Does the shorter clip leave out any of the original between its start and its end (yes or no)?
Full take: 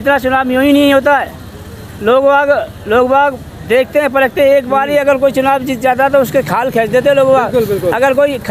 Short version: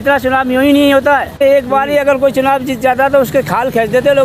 yes